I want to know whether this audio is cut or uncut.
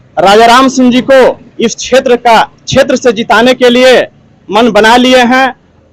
uncut